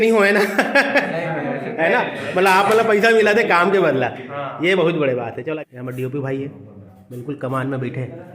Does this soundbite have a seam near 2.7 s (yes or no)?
no